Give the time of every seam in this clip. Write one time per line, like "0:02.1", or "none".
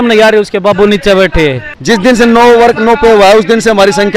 0:01.7